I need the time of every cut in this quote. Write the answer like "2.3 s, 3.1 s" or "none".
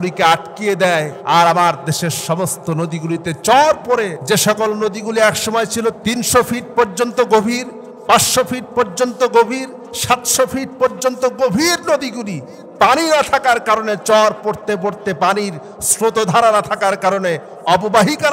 1.2 s, 4.2 s